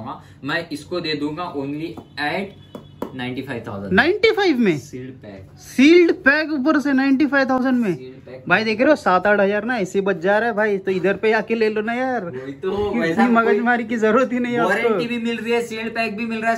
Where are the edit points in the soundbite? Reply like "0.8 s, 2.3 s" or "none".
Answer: none